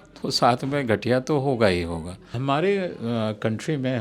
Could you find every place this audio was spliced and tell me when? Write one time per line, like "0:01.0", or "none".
0:02.4